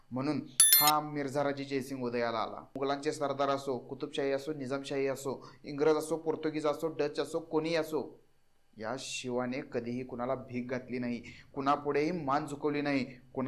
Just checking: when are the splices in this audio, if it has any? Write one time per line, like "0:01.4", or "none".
0:02.7